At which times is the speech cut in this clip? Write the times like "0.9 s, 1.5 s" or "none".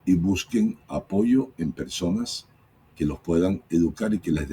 none